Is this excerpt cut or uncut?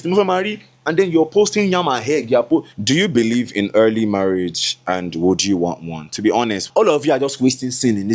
cut